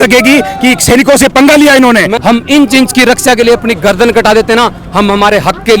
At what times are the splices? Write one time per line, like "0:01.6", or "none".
0:02.1